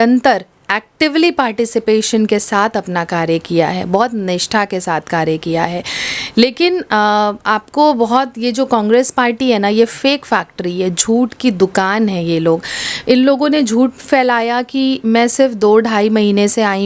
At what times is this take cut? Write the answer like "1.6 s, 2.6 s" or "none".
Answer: none